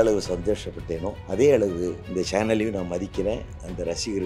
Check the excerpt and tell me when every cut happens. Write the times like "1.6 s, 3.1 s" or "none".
1.2 s, 2.0 s